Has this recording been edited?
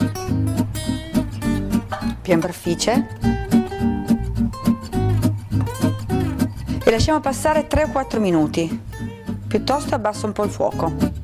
no; 0 cuts

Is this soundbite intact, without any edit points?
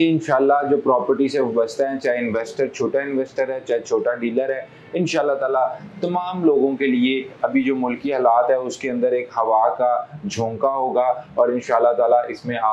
yes; 0 cuts

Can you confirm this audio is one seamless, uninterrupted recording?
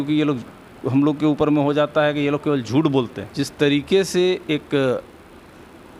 no; 1 cut; at 3.2 s

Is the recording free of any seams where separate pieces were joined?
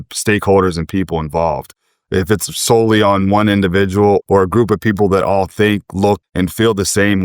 no; 2 cuts; at 4.2 s, 6.2 s

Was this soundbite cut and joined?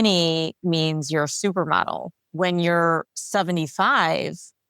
yes; 2 cuts; at 2.2 s, 3.1 s

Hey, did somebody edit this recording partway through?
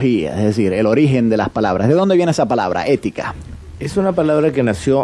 yes; 1 cut; at 2.7 s

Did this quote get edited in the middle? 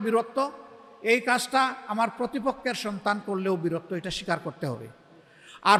no; 0 cuts

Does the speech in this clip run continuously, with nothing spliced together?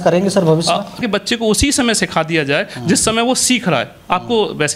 no; 1 cut; at 1.0 s

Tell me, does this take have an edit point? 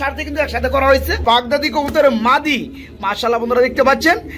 yes; 1 cut; at 1.2 s

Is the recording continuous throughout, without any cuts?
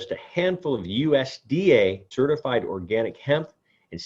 no; 1 cut; at 2.1 s

